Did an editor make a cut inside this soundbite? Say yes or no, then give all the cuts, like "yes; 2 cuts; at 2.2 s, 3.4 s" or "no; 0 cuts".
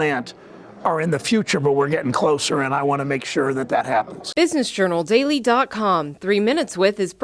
yes; 1 cut; at 4.2 s